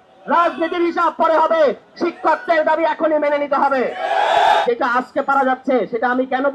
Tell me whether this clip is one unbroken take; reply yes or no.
no